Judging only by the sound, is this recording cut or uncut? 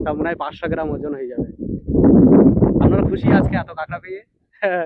uncut